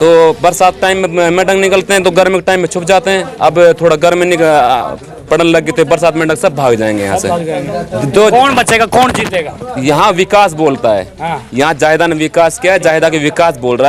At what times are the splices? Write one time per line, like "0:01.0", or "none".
none